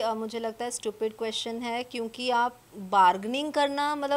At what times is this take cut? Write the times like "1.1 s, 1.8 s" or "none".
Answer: none

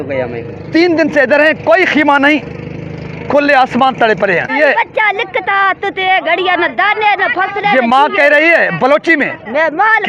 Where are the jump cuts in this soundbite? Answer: 4.5 s

